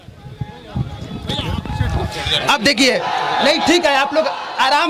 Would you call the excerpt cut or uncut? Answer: uncut